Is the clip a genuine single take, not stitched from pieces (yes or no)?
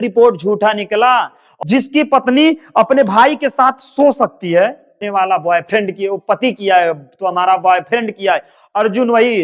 no